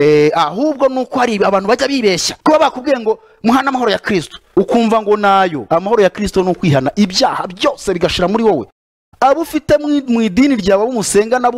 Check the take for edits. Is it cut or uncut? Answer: cut